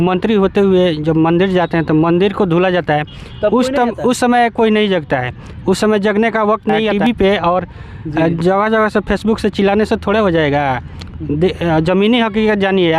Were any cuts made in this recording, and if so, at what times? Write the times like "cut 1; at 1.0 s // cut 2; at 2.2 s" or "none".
none